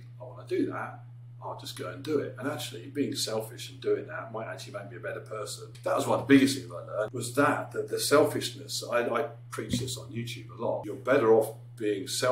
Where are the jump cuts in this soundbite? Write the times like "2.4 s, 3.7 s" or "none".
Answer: 5.7 s, 7.2 s, 10.8 s